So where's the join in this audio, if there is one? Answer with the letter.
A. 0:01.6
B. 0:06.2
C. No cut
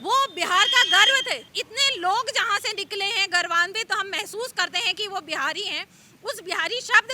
A